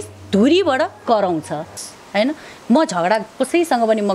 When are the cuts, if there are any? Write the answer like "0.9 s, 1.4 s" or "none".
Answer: 1.9 s